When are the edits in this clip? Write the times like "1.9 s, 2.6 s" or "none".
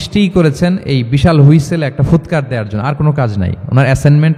none

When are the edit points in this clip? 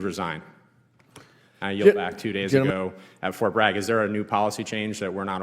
2.7 s

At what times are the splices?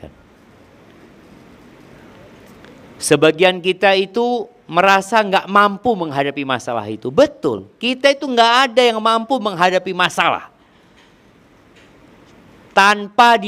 none

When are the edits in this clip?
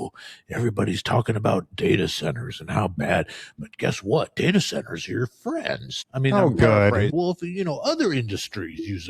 6.0 s, 7.1 s

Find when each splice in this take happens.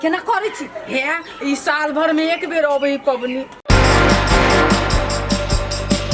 3.5 s

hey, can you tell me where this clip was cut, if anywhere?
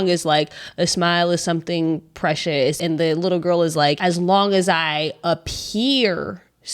2.8 s, 4.0 s

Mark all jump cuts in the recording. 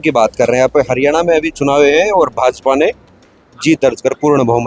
none

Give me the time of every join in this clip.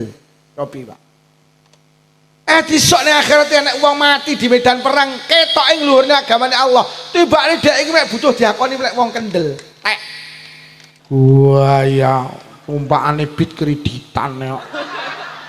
11.0 s

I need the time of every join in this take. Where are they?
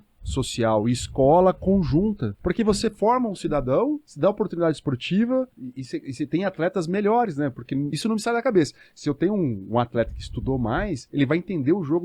2.3 s, 4.1 s, 5.6 s, 7.9 s

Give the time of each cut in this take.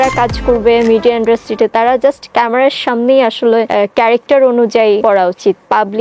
3.7 s, 5.0 s

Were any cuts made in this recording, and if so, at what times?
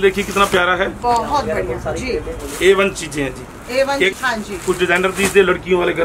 none

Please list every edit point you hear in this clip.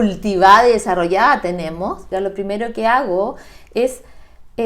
2.0 s

